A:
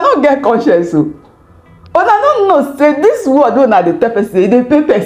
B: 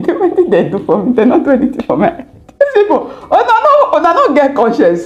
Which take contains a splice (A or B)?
B